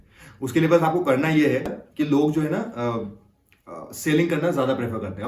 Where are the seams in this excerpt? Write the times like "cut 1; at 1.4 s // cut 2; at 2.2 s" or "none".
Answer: cut 1; at 1.8 s